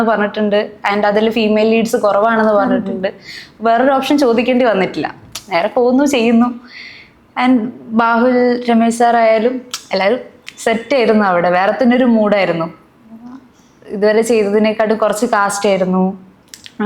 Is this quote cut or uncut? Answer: uncut